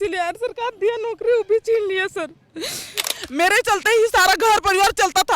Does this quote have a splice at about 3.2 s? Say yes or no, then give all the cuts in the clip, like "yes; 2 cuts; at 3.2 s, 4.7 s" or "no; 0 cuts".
yes; 1 cut; at 3.2 s